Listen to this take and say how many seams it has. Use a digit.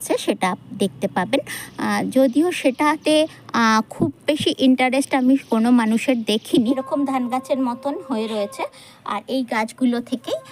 1